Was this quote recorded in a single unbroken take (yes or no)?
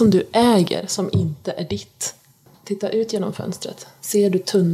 no